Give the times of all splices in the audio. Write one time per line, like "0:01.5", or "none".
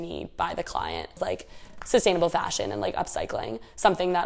0:01.2